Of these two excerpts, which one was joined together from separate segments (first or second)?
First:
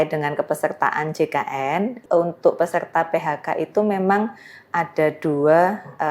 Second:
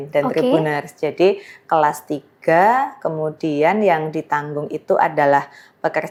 first